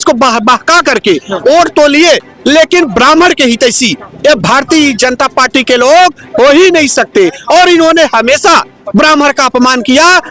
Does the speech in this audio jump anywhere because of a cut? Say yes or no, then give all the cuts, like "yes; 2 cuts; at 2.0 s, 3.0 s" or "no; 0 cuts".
no; 0 cuts